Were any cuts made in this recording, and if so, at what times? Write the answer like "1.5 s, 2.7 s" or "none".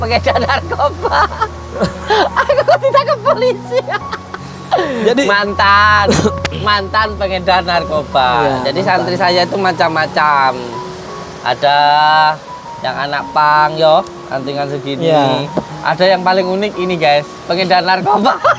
none